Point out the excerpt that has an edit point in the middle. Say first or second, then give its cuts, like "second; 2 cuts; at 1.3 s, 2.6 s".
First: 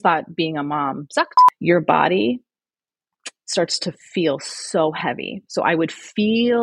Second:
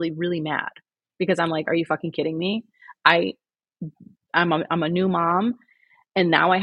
first; 1 cut; at 1.4 s